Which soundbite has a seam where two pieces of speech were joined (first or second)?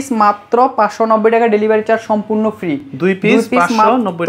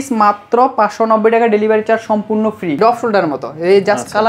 second